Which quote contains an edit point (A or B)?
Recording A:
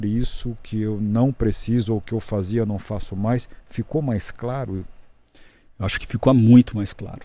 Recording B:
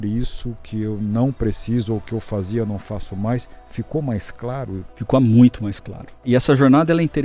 B